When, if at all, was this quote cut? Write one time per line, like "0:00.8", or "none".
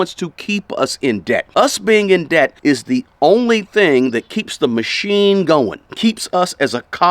0:01.5
0:02.6
0:05.8